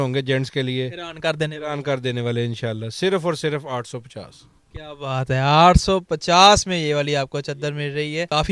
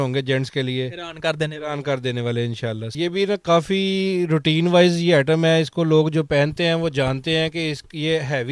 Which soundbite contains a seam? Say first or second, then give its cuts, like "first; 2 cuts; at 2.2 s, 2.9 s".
second; 1 cut; at 2.9 s